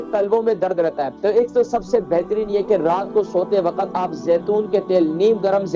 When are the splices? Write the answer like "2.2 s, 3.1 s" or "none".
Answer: 1.1 s